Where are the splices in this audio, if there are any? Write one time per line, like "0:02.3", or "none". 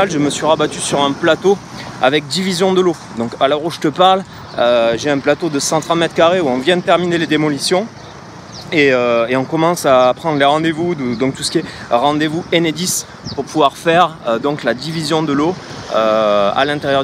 none

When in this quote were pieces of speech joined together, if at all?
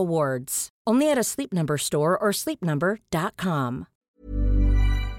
0:03.9

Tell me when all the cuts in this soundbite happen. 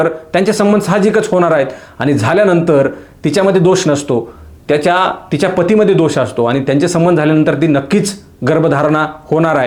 none

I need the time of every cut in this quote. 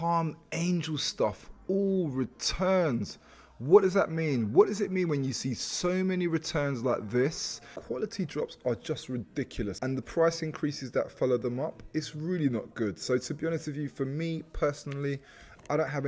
0:07.8
0:09.8

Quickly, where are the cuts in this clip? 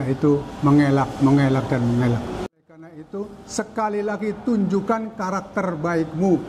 0:02.6

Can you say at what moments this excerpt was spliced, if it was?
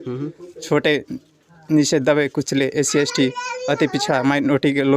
none

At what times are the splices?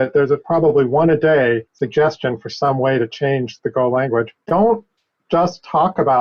0:01.7
0:04.4

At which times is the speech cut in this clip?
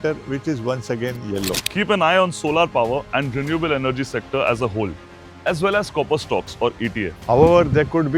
0:01.6
0:07.2

